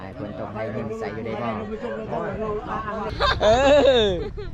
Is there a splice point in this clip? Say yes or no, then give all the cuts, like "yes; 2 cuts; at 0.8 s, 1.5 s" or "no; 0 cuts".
yes; 1 cut; at 3.1 s